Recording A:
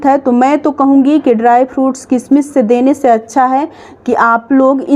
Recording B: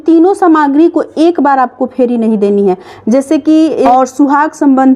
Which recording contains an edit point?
B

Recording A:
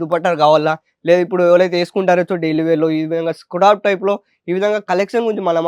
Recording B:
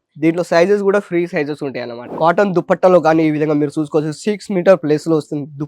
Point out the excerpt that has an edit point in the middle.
B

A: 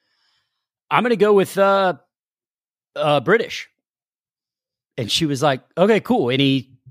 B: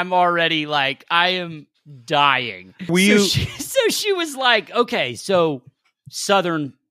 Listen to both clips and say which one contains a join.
B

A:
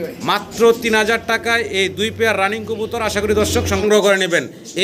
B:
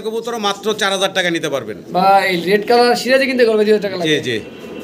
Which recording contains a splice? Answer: A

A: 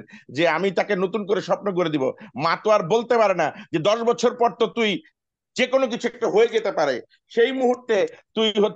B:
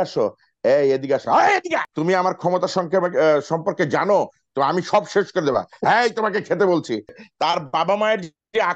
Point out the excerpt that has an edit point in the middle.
B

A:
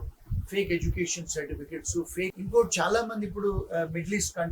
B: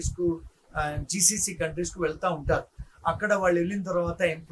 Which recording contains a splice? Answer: A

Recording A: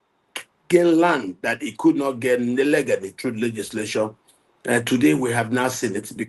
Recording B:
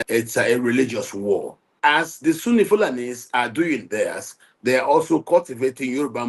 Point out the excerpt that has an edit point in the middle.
B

